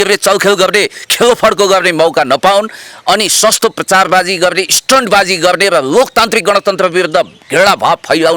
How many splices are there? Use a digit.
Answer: 0